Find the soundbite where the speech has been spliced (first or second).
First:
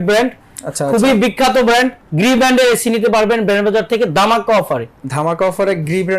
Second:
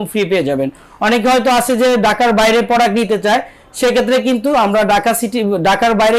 first